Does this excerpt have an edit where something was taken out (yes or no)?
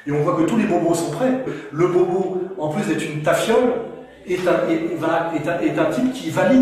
yes